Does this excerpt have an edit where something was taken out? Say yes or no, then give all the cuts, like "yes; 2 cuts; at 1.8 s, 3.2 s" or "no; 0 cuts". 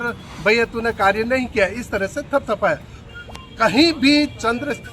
yes; 1 cut; at 3.1 s